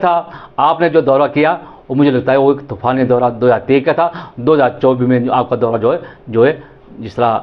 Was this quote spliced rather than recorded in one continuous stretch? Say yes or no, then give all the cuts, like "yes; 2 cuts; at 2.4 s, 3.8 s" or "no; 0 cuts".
no; 0 cuts